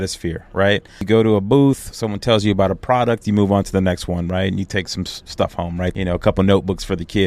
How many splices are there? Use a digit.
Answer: 2